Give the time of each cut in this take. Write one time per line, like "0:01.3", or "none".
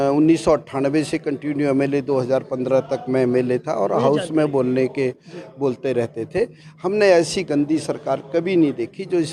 none